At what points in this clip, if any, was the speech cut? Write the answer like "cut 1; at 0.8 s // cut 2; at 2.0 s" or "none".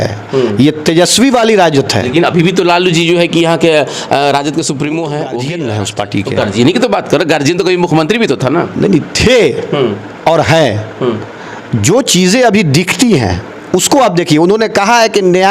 cut 1; at 5.4 s